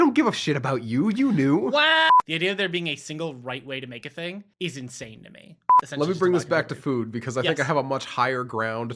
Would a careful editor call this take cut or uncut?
cut